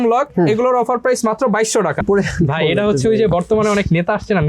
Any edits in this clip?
yes; 1 cut; at 2.0 s

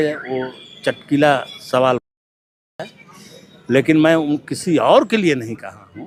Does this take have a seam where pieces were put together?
no; 0 cuts

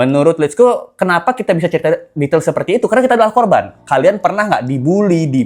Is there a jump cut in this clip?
no; 0 cuts

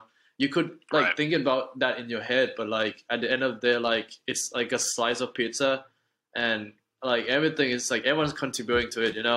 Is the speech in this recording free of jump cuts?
yes; 0 cuts

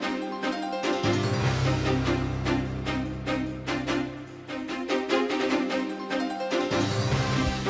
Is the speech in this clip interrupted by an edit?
no; 0 cuts

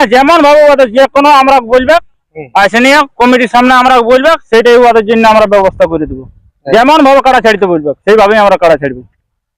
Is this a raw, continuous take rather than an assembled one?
yes; 0 cuts

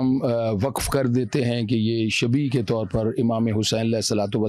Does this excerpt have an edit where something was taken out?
no; 0 cuts

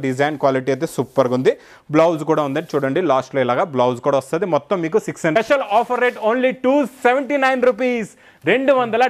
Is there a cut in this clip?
yes; 1 cut; at 5.3 s

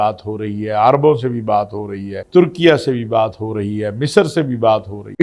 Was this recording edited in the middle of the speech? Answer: no; 0 cuts

